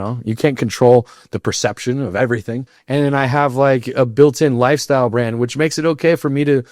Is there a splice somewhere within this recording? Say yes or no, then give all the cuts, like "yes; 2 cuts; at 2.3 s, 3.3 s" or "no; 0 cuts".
yes; 1 cut; at 2.7 s